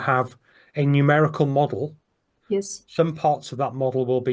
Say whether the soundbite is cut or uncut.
uncut